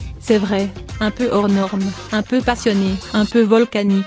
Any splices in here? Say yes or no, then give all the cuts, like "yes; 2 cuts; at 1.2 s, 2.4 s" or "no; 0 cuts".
no; 0 cuts